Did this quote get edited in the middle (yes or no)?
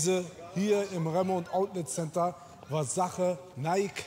no